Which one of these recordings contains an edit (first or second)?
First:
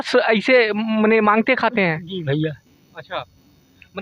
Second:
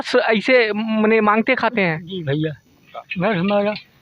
second